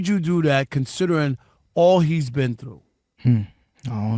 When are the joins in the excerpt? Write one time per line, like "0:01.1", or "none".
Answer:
none